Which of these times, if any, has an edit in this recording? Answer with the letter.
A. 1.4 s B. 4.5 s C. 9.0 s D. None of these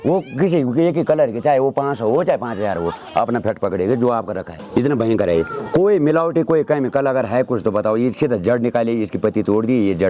B